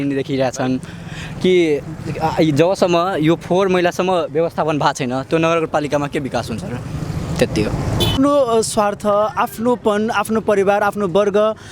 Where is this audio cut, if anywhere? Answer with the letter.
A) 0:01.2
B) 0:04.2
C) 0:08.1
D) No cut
C